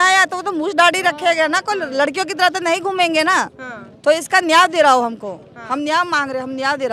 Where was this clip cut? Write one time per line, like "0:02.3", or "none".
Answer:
none